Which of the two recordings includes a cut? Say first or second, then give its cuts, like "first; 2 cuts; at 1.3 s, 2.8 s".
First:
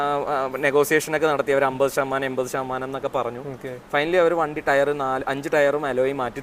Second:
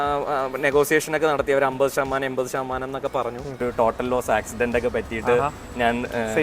second; 1 cut; at 3.6 s